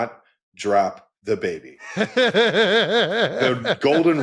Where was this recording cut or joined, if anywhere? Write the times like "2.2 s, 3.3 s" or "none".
1.8 s, 3.3 s